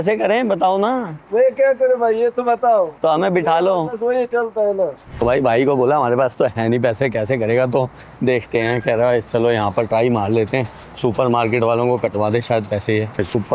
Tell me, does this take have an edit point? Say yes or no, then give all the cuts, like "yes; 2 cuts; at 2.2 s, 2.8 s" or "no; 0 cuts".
no; 0 cuts